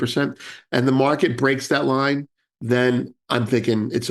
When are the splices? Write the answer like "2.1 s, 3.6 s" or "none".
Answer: 3.2 s